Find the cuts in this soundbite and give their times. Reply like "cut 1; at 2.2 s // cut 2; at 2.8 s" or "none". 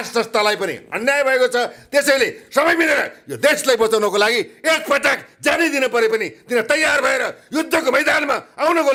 none